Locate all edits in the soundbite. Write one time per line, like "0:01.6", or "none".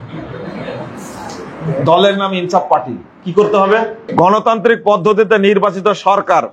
0:04.0